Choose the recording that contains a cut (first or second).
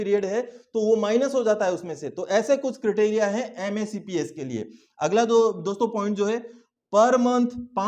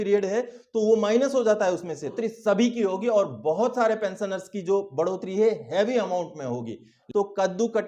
second